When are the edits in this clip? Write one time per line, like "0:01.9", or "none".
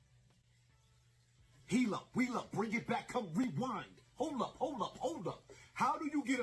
0:05.2